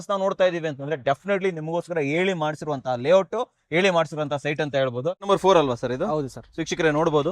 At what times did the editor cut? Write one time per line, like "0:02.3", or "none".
0:05.2